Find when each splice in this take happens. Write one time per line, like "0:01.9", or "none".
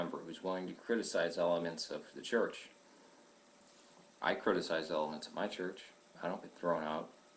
0:03.0